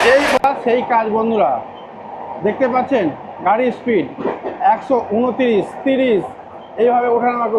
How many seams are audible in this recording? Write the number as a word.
zero